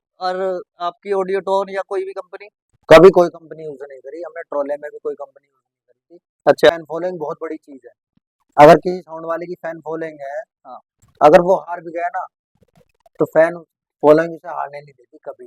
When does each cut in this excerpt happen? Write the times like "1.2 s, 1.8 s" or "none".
6.7 s